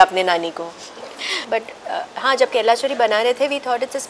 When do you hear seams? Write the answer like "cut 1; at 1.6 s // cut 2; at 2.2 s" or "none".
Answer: cut 1; at 1.4 s